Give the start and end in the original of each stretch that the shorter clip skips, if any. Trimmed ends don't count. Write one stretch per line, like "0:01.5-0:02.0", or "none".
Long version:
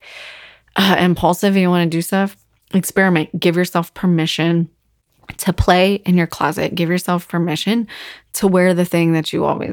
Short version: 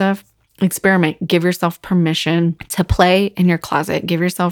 0:04.8-0:05.3